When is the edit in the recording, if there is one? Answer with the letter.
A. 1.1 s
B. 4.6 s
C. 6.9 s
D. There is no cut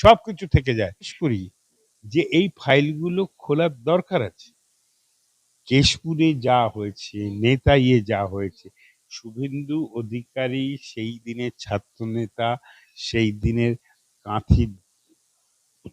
A